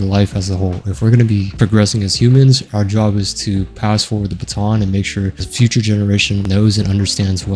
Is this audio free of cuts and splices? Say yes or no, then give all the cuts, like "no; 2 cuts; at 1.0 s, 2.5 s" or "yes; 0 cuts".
no; 1 cut; at 6.4 s